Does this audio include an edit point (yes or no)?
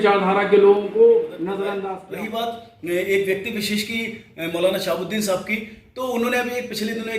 yes